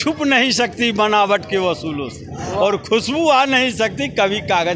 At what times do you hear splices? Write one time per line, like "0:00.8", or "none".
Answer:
none